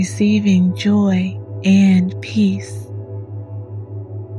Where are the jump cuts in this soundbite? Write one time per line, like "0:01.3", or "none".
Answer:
0:02.6